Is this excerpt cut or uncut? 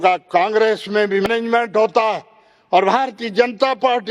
cut